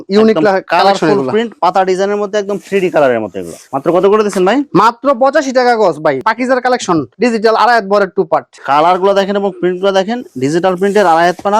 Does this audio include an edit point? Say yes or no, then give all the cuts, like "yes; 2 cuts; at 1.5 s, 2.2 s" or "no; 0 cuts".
no; 0 cuts